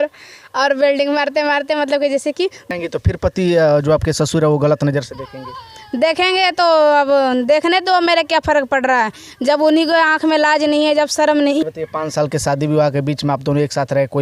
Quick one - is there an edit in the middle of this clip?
yes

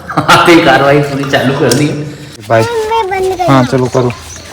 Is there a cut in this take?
yes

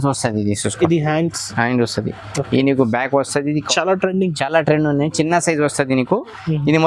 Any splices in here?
yes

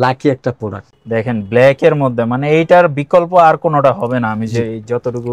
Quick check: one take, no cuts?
no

